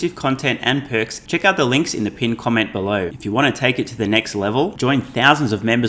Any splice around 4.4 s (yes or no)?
no